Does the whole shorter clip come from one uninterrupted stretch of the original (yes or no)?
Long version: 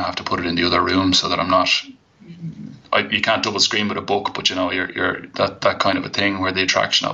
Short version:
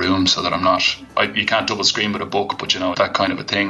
no